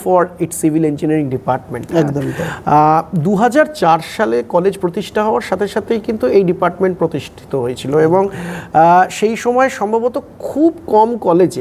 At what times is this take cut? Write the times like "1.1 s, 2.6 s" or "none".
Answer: none